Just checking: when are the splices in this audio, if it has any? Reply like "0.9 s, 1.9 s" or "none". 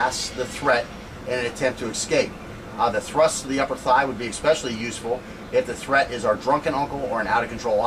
4.3 s